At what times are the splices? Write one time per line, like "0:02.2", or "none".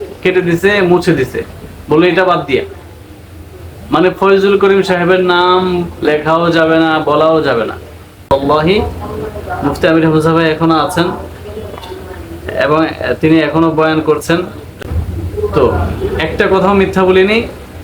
0:08.3
0:14.6